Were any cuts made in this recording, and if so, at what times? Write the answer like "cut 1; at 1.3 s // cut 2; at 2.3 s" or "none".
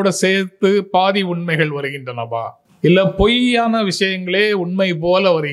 none